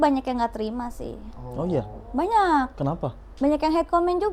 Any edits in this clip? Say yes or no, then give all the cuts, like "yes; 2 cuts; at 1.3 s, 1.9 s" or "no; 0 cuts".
no; 0 cuts